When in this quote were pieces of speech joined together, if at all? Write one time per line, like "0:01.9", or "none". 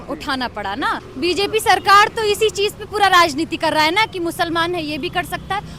0:01.0